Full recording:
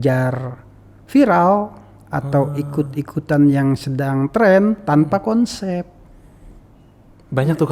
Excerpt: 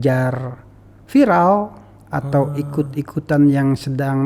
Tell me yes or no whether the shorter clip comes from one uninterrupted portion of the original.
yes